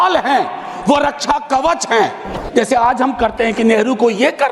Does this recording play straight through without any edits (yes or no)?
no